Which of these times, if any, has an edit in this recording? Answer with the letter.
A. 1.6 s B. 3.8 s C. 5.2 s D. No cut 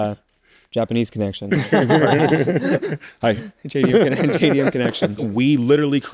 C